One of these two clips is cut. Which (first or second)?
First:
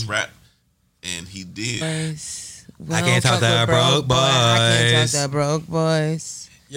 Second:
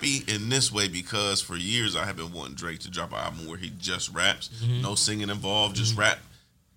first